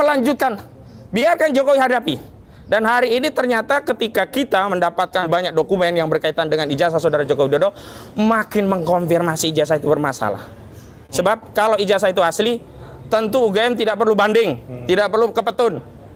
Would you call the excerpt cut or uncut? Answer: uncut